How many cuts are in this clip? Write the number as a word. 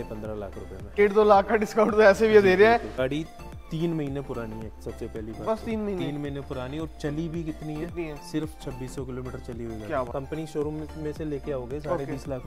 three